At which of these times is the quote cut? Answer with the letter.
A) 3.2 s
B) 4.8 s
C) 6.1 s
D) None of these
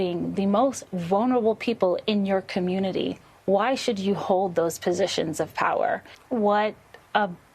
C